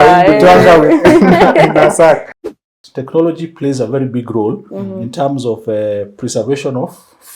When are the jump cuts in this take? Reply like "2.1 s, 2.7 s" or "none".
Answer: 2.4 s